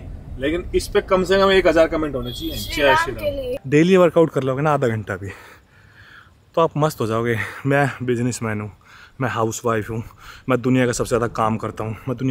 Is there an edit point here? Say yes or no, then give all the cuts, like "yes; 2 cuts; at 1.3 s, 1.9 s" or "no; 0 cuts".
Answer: yes; 1 cut; at 3.6 s